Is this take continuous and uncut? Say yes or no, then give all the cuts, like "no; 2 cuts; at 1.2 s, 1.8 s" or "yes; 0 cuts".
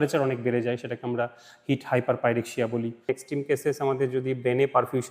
no; 1 cut; at 3.1 s